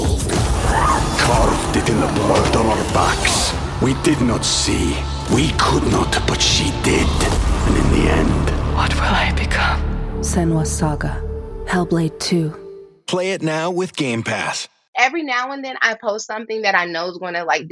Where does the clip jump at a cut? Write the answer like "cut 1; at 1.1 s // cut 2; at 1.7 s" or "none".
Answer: cut 1; at 14.9 s